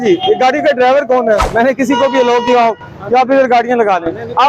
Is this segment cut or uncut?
cut